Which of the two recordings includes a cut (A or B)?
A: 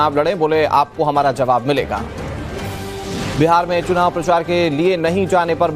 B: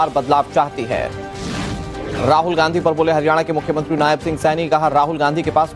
A